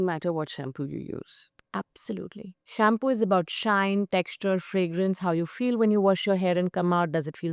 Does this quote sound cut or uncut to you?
cut